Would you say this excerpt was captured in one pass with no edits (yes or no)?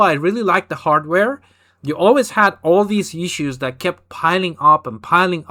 yes